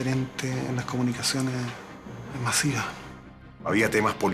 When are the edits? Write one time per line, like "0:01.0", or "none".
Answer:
0:03.4